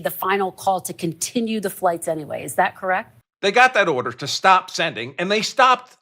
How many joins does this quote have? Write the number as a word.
one